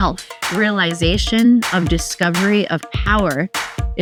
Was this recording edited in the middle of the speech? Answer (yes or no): no